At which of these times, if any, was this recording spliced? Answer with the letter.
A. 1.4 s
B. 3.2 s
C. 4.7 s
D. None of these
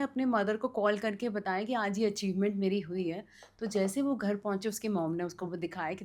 D